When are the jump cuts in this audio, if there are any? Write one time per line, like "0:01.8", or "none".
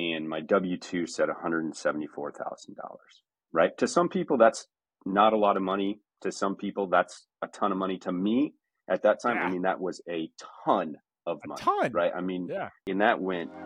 0:12.8